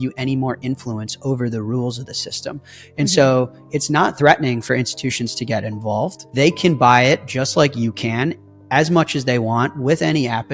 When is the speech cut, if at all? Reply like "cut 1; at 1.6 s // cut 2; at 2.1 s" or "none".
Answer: cut 1; at 6.2 s